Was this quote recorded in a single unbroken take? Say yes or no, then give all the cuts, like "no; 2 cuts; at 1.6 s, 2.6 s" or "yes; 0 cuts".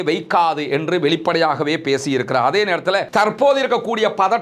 no; 1 cut; at 3.1 s